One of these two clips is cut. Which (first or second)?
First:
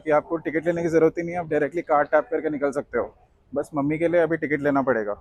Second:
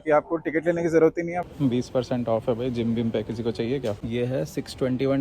second